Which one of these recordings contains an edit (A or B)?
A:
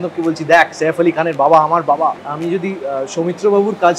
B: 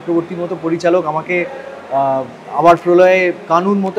A